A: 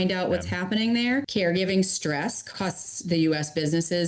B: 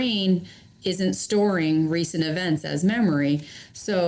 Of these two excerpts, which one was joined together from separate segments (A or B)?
A